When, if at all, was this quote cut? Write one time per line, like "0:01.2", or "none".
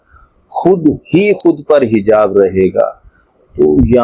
none